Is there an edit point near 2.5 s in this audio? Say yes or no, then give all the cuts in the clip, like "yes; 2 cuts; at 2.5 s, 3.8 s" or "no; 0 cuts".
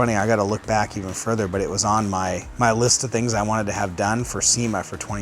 yes; 1 cut; at 2.5 s